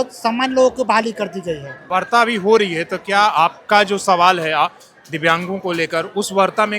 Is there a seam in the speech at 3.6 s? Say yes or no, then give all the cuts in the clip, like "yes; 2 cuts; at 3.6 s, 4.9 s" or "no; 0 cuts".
no; 1 cut; at 1.7 s